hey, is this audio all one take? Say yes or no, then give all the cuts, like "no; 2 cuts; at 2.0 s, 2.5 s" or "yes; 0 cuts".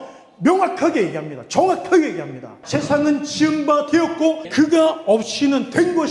no; 1 cut; at 2.5 s